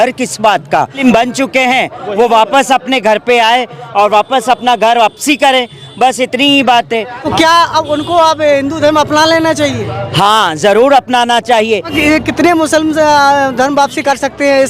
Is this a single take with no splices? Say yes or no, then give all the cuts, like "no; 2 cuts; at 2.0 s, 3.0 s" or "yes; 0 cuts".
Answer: no; 3 cuts; at 0.9 s, 7.2 s, 11.9 s